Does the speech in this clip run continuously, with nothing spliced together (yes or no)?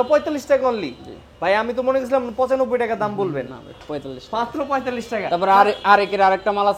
yes